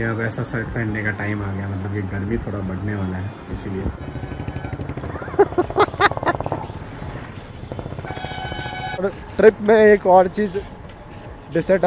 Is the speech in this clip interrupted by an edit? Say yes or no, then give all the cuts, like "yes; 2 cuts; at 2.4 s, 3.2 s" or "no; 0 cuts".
yes; 2 cuts; at 4.0 s, 9.0 s